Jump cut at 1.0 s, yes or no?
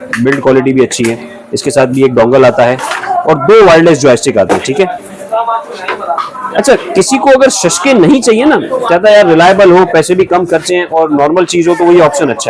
no